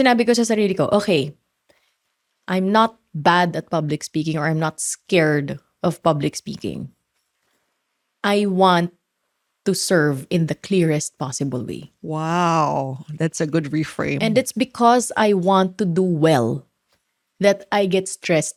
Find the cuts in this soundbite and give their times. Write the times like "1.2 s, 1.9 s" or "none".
none